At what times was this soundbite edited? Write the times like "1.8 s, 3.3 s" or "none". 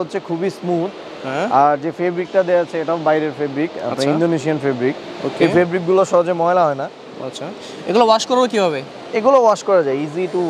none